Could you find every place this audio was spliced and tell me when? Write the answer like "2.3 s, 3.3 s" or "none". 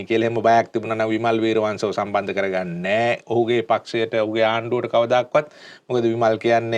none